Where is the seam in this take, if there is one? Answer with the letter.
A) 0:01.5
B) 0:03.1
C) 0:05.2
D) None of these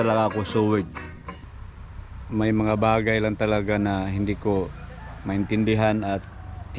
A